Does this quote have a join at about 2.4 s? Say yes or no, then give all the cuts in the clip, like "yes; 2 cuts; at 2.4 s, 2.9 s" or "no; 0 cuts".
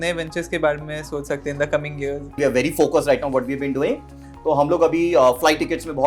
yes; 1 cut; at 2.4 s